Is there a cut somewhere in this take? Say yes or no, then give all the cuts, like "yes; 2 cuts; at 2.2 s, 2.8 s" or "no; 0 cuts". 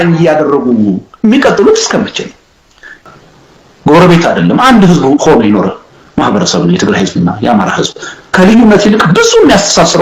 yes; 1 cut; at 3.0 s